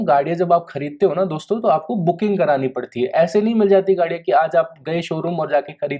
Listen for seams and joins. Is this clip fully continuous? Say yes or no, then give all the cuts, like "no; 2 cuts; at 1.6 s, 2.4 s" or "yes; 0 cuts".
yes; 0 cuts